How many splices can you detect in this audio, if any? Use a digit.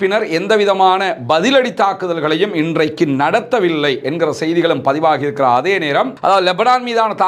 1